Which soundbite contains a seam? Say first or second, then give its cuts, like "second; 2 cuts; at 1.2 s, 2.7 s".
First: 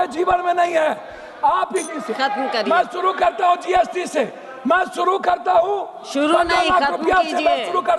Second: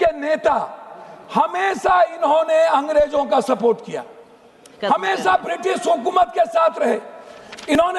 first; 1 cut; at 1.9 s